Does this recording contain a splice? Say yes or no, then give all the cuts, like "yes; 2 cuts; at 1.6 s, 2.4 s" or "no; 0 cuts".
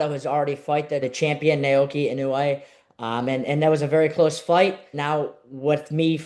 yes; 2 cuts; at 1.0 s, 4.9 s